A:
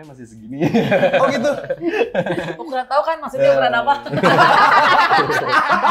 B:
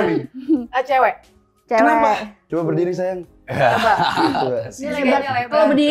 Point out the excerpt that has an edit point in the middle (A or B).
B